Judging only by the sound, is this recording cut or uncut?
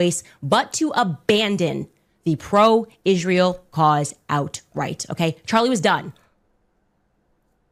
uncut